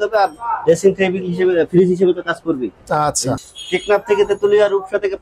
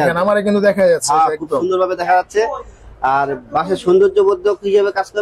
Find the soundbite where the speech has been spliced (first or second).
first